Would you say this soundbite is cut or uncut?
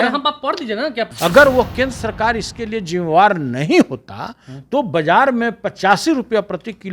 cut